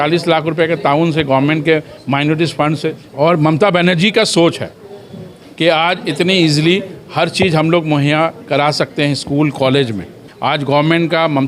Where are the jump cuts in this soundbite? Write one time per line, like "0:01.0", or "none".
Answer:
0:03.0
0:10.2